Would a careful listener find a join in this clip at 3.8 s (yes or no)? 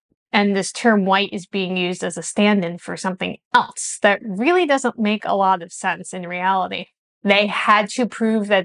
no